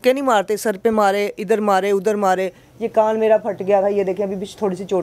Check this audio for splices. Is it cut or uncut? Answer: uncut